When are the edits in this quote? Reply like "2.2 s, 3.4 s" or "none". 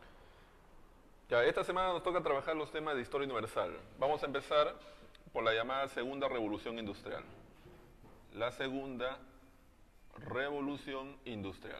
9.1 s